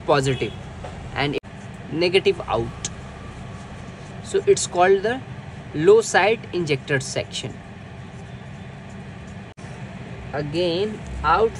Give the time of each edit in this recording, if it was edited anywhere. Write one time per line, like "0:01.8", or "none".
0:01.4
0:09.6